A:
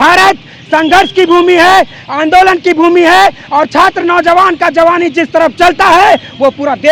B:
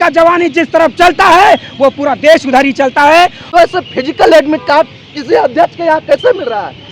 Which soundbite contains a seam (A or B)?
B